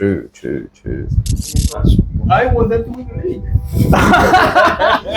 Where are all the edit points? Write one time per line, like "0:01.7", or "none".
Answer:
0:01.5